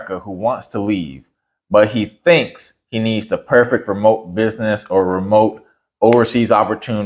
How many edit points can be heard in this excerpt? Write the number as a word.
zero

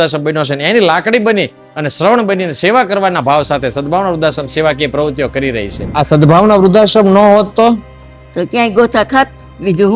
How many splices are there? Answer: one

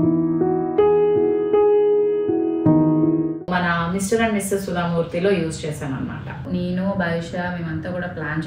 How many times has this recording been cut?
two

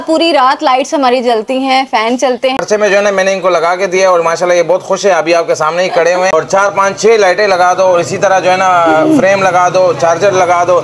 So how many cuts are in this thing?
two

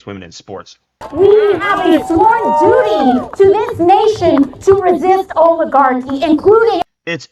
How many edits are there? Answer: one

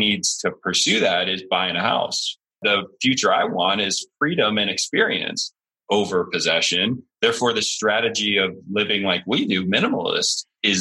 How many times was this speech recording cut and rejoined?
one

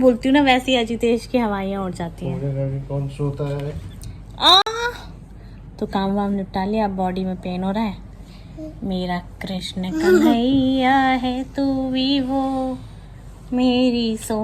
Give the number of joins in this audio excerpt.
zero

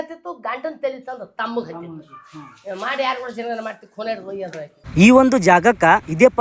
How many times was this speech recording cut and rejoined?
one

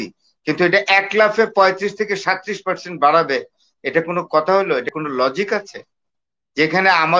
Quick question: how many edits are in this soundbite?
zero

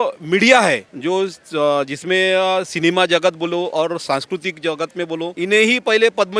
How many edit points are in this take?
two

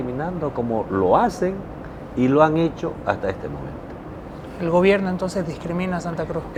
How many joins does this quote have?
zero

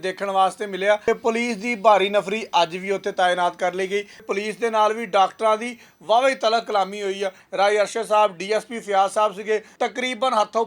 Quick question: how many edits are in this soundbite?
four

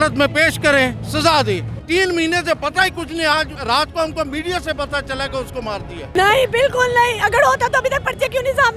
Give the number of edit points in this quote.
three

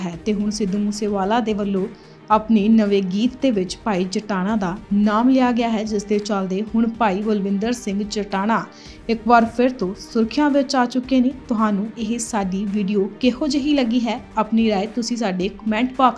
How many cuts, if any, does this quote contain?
one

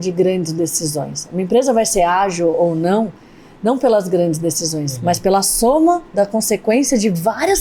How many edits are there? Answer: zero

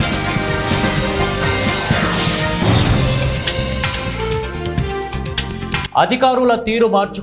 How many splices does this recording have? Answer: one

